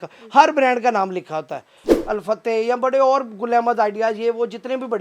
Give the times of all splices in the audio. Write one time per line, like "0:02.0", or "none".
0:01.9